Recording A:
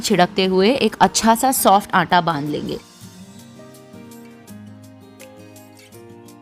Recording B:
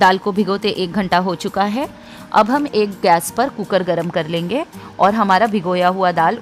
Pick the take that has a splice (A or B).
A